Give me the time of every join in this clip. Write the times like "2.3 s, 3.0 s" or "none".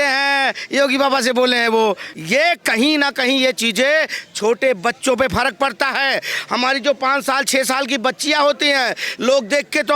2.1 s